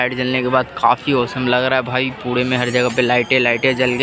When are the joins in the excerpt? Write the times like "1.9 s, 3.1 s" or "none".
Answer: none